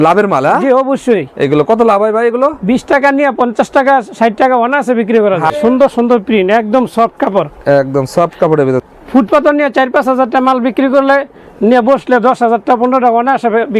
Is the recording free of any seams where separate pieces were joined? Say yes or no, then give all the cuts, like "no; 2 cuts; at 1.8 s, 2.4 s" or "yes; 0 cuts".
no; 2 cuts; at 5.5 s, 8.8 s